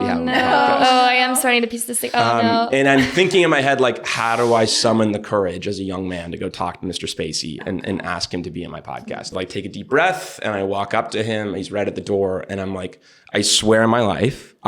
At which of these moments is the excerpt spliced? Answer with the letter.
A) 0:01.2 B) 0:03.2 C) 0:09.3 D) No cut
C